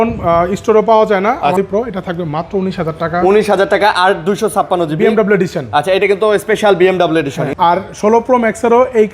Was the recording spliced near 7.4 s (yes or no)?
yes